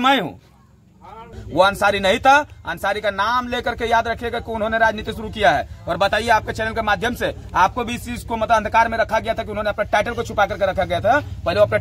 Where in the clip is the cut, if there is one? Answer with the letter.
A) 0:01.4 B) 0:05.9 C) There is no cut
A